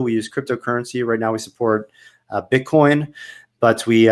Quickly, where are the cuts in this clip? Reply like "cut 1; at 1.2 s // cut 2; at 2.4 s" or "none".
none